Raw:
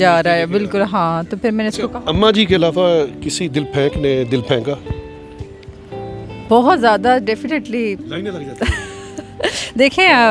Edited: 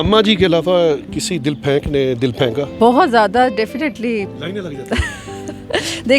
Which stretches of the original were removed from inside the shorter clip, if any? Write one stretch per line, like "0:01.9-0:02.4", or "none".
0:04.8-0:06.4